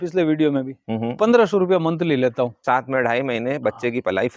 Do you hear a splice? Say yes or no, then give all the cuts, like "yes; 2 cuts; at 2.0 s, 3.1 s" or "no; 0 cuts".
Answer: yes; 1 cut; at 2.6 s